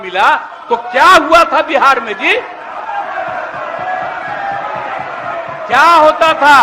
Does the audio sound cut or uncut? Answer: uncut